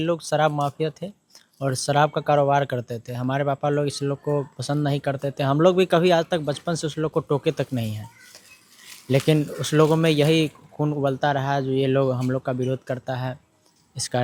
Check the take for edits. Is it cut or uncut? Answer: uncut